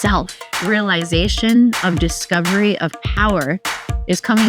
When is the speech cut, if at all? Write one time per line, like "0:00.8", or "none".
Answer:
none